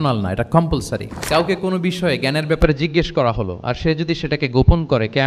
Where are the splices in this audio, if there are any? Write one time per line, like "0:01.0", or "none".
0:01.2

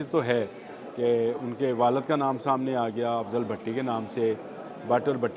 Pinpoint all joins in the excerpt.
none

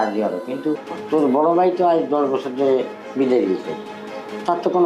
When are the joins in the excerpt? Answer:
0:00.9

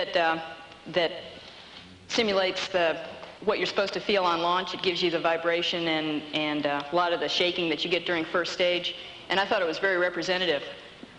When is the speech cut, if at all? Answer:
none

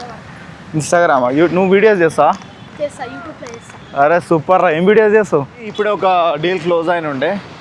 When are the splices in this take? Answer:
0:05.7

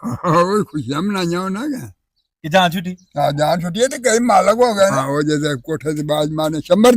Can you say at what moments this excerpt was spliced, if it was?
0:05.0

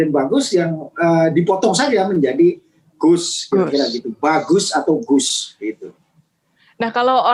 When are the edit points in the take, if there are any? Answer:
none

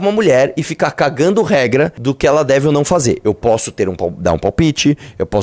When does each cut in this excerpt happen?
0:02.0

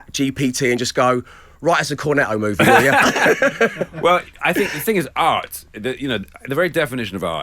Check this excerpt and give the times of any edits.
none

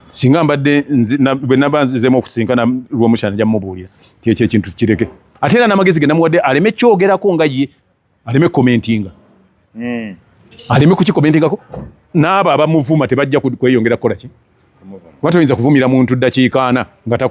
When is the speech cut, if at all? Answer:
none

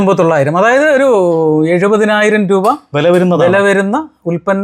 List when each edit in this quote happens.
none

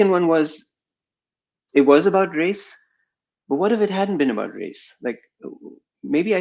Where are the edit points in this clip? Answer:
0:01.6

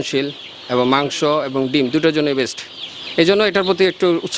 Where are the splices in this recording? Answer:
none

